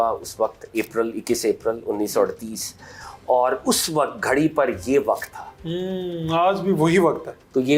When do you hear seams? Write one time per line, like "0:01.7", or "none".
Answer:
none